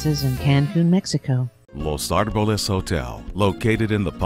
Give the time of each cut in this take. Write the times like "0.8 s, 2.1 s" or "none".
1.6 s